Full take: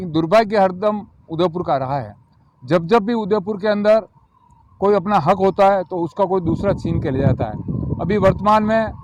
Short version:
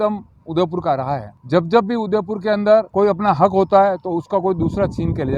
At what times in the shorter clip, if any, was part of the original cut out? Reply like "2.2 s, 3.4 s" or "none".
1.3 s, 2.9 s